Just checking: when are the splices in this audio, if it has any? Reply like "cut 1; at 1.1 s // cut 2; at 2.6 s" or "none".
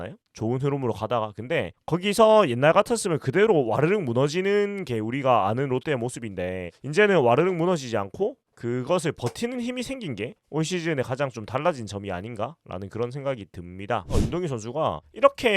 cut 1; at 14.1 s